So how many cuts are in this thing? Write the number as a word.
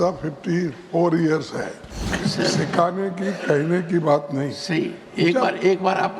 one